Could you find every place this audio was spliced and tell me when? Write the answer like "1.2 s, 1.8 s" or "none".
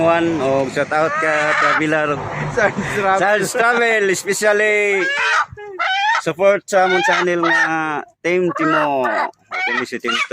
none